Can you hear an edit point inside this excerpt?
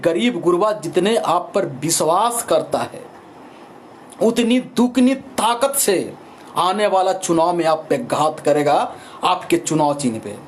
no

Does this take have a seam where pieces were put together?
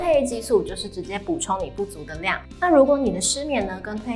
yes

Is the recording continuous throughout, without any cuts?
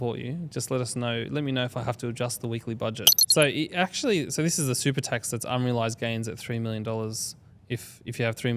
no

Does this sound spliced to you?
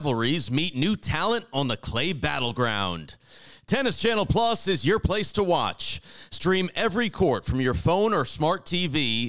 no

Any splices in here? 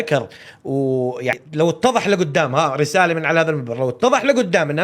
yes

